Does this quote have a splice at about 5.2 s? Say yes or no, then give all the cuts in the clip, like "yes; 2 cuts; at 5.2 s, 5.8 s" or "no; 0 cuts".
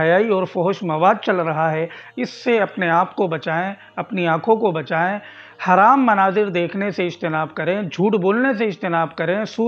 no; 0 cuts